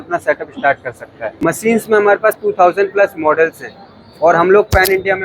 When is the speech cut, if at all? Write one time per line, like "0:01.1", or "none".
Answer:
0:01.2